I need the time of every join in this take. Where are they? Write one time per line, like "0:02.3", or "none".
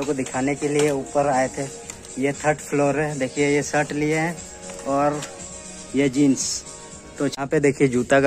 0:07.3